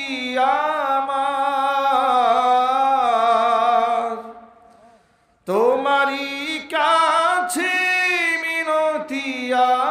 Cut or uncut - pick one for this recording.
uncut